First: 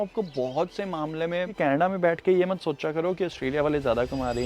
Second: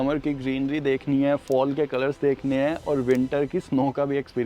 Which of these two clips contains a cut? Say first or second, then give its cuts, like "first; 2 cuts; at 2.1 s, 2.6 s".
first; 1 cut; at 1.5 s